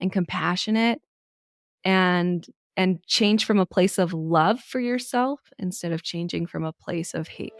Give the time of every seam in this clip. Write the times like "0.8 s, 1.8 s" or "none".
none